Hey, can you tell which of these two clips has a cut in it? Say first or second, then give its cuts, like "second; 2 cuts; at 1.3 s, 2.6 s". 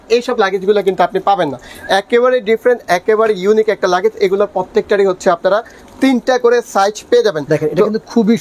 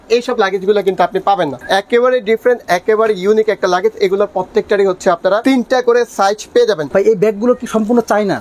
second; 3 cuts; at 1.6 s, 5.4 s, 6.8 s